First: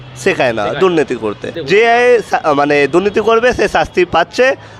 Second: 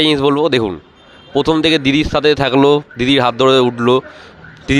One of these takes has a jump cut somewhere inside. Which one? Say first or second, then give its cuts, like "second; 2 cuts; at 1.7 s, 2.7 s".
first; 1 cut; at 1.5 s